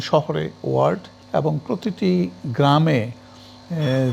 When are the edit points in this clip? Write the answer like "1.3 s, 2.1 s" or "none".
none